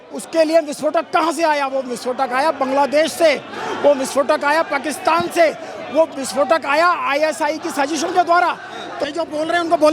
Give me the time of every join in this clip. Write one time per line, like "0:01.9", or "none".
0:09.0